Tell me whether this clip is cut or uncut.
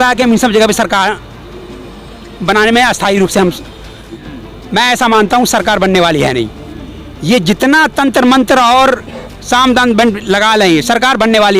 cut